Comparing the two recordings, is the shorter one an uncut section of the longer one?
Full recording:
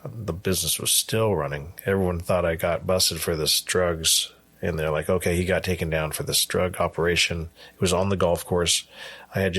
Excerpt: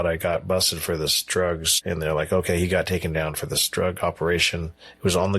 no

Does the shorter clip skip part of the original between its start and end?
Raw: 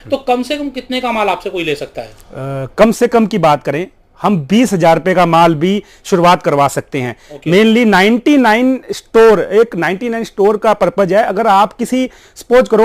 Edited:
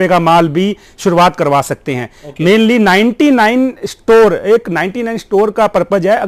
no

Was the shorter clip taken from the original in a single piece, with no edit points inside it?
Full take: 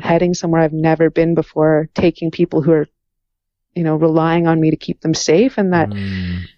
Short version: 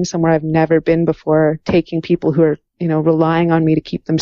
no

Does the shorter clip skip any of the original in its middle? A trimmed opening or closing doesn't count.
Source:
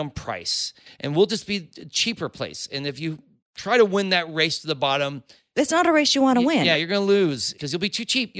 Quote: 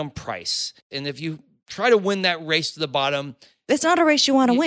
yes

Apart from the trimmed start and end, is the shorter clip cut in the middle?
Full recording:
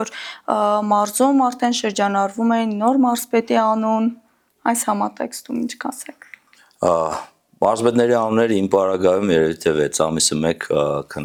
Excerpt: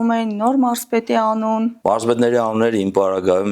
yes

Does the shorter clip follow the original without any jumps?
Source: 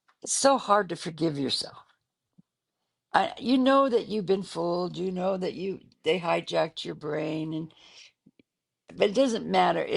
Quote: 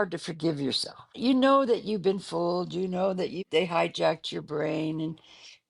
no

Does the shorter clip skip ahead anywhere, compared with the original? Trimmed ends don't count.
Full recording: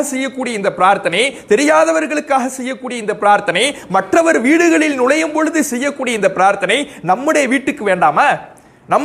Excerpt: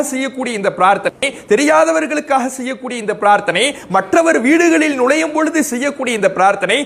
no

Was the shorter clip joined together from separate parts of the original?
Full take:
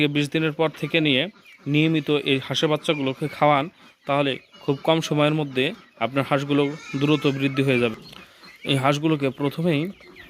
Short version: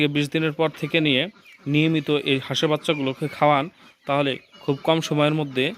no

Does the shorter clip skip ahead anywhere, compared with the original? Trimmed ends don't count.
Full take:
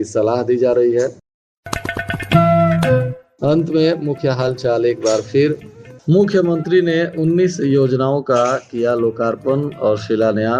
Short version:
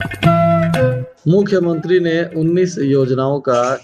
yes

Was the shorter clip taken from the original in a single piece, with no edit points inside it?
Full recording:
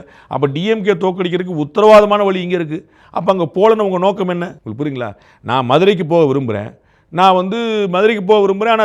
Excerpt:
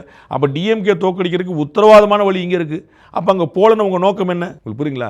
yes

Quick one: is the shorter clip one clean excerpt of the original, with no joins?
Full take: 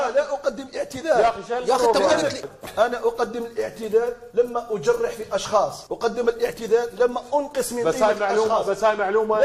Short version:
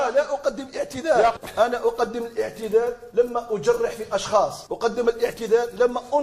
no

